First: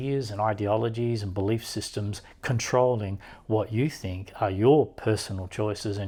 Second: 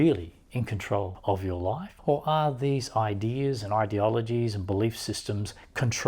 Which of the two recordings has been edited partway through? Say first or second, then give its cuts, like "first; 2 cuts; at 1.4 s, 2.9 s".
second; 2 cuts; at 1.1 s, 1.9 s